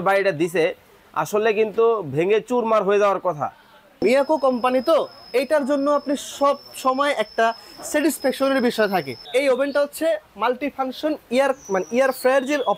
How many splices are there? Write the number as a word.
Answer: two